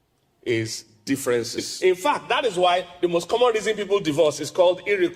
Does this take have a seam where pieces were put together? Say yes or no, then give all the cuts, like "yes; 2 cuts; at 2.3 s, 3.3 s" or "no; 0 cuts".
yes; 1 cut; at 1.7 s